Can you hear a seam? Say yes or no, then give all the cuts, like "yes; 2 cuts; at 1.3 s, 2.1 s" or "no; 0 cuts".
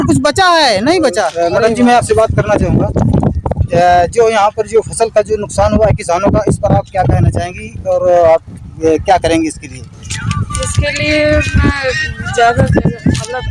yes; 1 cut; at 1.3 s